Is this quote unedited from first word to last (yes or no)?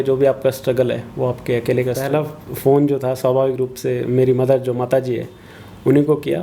no